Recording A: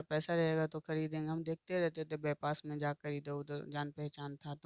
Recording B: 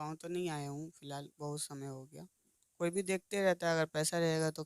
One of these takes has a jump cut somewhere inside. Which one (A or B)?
B